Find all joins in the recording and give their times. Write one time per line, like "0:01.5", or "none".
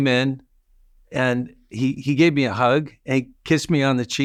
none